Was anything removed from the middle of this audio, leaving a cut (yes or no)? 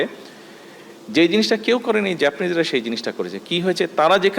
no